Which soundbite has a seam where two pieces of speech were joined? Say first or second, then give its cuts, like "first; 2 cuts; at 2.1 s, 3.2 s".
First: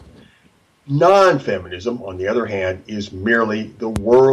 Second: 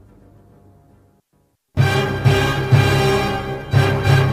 first; 1 cut; at 2.0 s